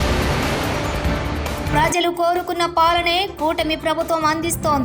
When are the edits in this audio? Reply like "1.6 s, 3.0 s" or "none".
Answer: 1.7 s